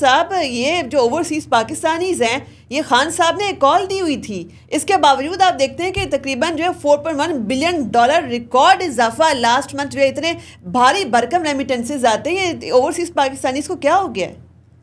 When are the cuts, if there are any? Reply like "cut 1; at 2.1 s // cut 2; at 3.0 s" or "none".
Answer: none